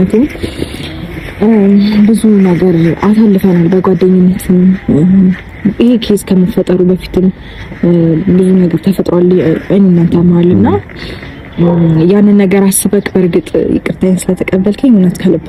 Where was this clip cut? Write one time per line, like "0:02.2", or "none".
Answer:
none